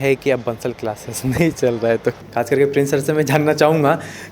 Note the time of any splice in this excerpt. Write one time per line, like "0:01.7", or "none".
0:02.2